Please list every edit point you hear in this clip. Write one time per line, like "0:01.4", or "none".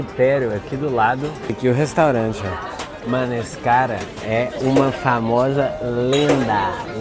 0:03.0